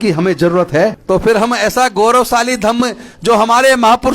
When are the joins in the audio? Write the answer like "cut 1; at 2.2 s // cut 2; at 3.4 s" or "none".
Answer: cut 1; at 1.0 s

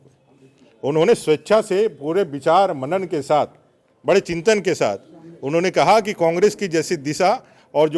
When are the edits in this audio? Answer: none

